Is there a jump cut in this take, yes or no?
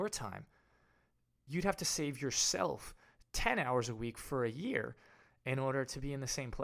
yes